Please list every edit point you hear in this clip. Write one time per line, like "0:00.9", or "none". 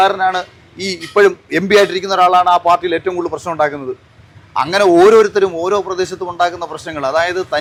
none